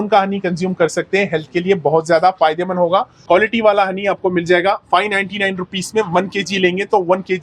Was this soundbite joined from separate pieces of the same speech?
yes; 1 cut; at 3.1 s

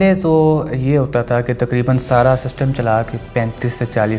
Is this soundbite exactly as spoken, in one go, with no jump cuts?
yes; 0 cuts

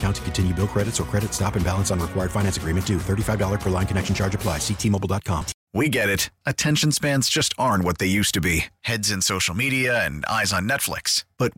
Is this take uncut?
no; 1 cut; at 5.6 s

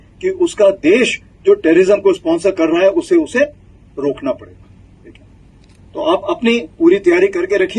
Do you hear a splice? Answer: no; 0 cuts

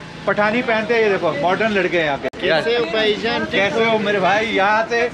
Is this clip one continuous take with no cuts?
yes; 0 cuts

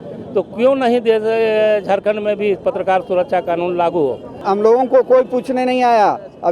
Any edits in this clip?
yes; 1 cut; at 4.3 s

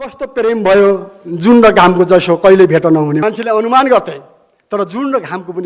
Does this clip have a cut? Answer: yes; 1 cut; at 3.2 s

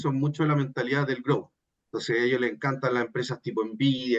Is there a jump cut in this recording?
no; 0 cuts

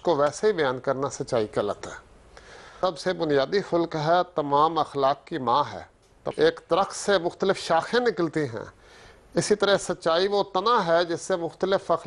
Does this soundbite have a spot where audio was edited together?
yes; 2 cuts; at 2.8 s, 6.3 s

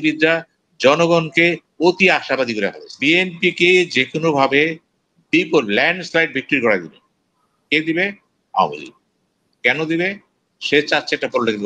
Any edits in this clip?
yes; 1 cut; at 3.0 s

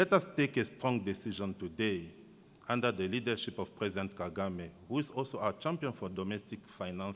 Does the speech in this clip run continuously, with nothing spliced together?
yes; 0 cuts

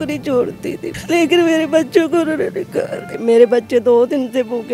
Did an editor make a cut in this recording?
yes; 2 cuts; at 0.9 s, 3.2 s

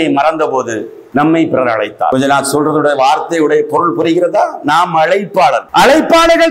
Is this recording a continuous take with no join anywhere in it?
no; 3 cuts; at 1.0 s, 2.1 s, 5.7 s

